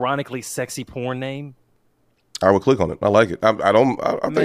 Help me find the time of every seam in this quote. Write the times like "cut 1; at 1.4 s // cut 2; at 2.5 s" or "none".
none